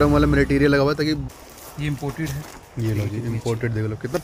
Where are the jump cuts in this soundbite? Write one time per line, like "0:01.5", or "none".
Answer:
0:01.4